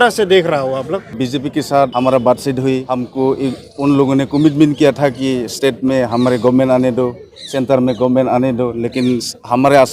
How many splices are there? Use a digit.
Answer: 3